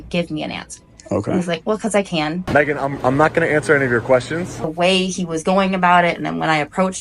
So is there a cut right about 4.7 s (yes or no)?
yes